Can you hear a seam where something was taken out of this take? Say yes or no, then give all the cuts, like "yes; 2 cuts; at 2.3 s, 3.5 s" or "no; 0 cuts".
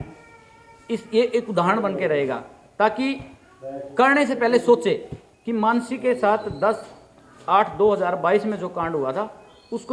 no; 0 cuts